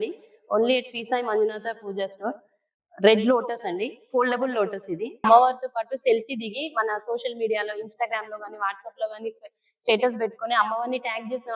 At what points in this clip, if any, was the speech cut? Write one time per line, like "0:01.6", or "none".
0:05.2